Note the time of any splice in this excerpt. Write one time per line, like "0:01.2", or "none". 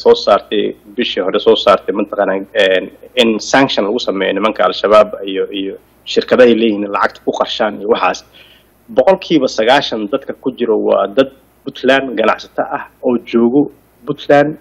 none